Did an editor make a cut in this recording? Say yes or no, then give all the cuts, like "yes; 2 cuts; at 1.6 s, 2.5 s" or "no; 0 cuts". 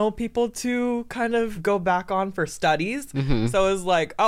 yes; 1 cut; at 1.5 s